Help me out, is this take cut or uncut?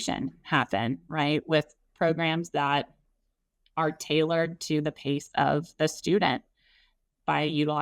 uncut